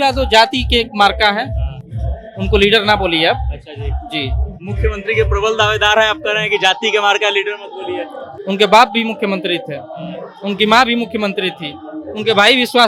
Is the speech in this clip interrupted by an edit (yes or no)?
no